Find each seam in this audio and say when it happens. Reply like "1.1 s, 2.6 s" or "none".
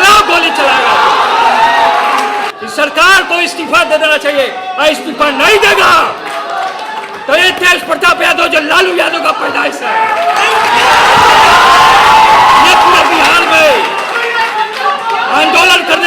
2.6 s

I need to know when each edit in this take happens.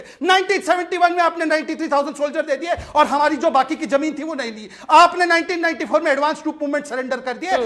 none

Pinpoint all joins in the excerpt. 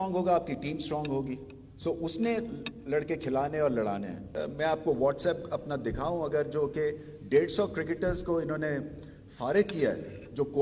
4.2 s

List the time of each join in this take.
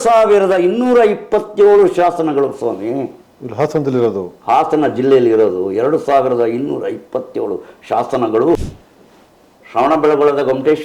8.7 s

